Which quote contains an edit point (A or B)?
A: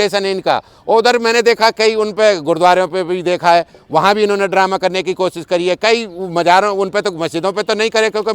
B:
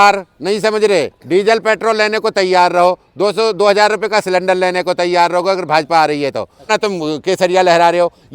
B